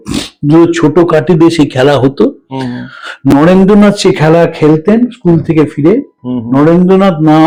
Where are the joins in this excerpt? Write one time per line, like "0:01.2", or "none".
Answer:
none